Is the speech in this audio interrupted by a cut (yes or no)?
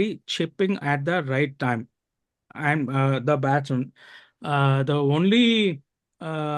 no